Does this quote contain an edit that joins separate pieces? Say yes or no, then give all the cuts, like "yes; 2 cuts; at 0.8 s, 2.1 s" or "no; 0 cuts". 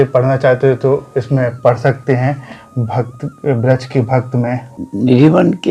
yes; 1 cut; at 4.7 s